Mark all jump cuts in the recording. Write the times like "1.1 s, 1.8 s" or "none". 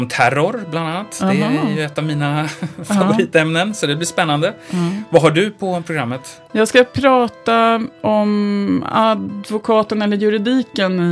none